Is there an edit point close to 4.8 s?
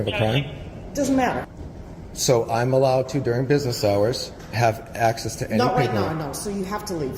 no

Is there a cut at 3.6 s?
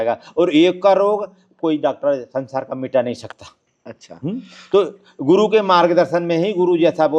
no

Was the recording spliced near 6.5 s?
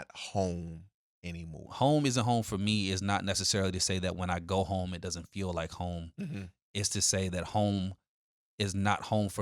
no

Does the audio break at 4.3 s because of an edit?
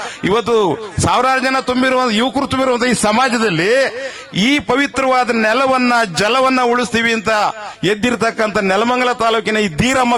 no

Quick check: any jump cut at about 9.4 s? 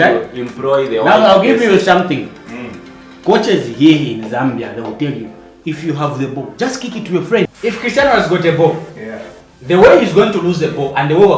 no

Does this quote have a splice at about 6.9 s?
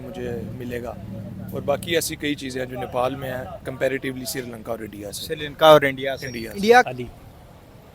yes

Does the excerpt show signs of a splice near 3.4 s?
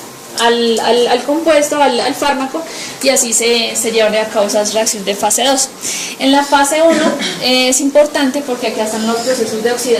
no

